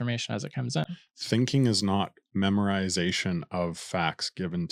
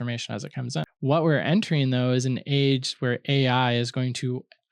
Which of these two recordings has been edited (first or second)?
second